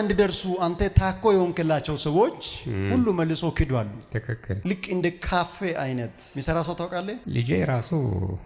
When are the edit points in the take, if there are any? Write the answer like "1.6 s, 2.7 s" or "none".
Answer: 4.6 s